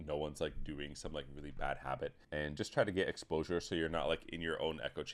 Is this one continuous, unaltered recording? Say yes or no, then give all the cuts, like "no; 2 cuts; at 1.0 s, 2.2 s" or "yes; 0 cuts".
no; 1 cut; at 2.2 s